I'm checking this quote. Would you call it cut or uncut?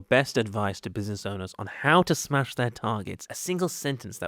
cut